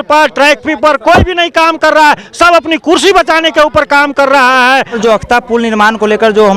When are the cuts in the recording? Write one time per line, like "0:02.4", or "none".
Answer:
0:05.0